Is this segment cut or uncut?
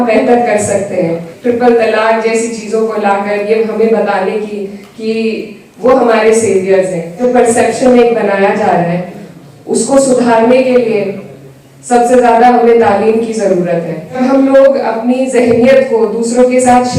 cut